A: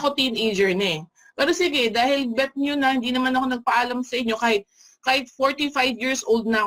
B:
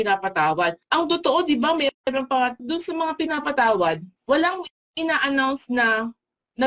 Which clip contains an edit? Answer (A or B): B